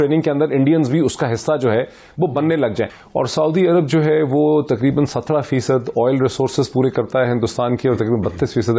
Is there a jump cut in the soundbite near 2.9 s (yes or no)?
yes